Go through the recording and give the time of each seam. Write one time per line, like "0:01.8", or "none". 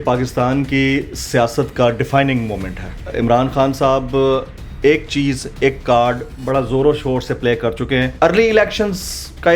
0:03.0
0:08.1